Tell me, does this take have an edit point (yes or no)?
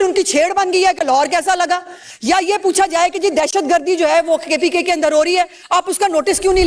yes